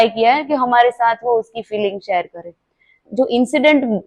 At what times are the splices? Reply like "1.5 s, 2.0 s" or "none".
3.0 s